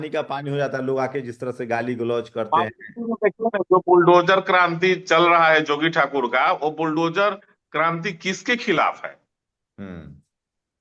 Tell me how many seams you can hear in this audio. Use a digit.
0